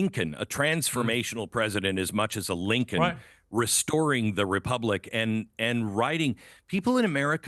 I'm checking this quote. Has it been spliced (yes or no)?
yes